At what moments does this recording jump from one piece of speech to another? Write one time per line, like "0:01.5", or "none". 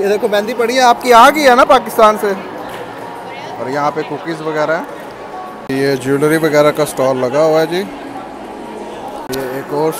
none